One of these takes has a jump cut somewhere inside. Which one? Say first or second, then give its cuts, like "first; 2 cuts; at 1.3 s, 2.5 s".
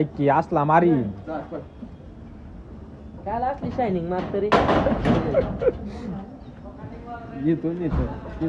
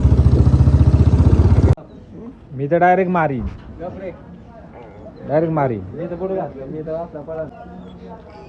second; 2 cuts; at 1.8 s, 7.6 s